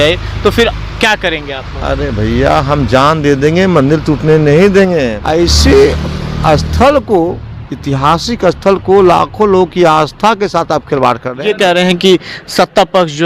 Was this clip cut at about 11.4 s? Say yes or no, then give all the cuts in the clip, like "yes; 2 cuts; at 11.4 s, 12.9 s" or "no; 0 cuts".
yes; 2 cuts; at 5.2 s, 11.4 s